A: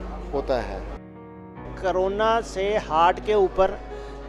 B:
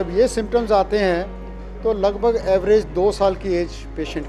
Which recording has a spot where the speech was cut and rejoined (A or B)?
A